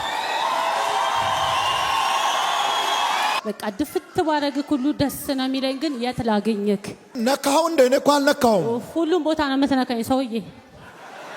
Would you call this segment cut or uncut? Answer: cut